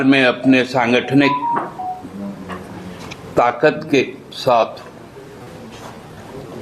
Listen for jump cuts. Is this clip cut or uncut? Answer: uncut